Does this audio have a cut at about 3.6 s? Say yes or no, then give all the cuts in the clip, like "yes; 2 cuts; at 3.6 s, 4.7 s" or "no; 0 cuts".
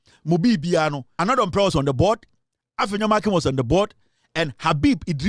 no; 1 cut; at 1.1 s